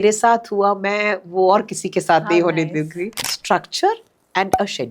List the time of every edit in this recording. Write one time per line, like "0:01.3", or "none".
0:03.3